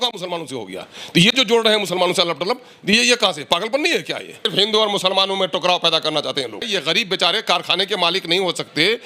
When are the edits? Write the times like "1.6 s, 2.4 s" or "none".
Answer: 4.5 s, 6.7 s